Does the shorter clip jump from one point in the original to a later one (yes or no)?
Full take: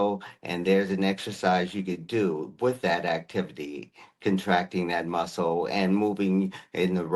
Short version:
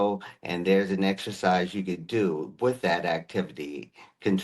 no